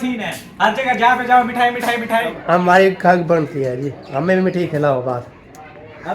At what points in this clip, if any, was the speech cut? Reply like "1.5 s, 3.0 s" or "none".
2.4 s